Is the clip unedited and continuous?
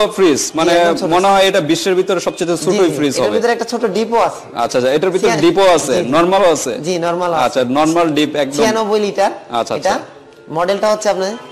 yes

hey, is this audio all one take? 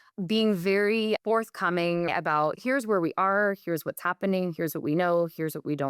no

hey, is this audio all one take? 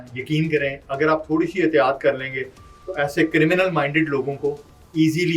yes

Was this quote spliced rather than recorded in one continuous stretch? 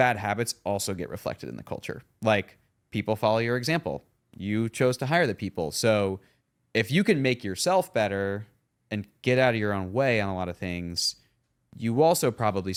no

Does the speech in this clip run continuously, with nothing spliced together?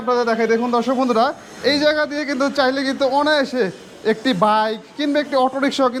yes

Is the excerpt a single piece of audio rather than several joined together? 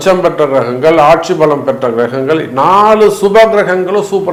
yes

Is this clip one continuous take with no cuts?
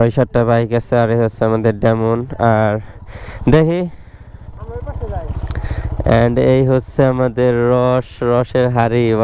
yes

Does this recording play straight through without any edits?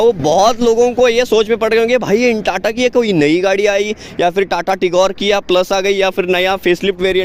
yes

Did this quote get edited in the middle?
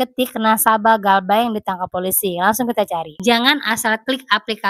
yes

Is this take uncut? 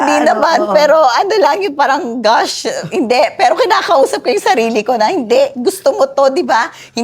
yes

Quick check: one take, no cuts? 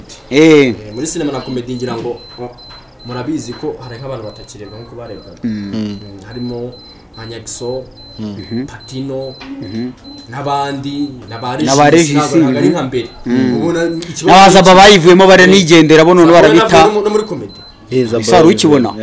yes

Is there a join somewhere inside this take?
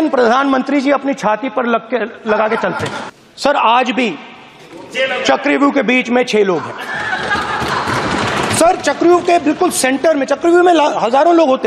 yes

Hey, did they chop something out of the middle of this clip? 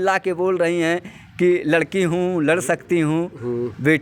no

